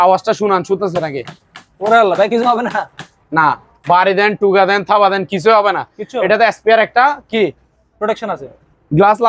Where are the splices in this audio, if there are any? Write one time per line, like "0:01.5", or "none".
none